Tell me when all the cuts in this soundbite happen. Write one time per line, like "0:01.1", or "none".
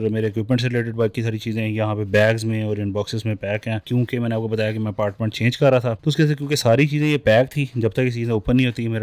none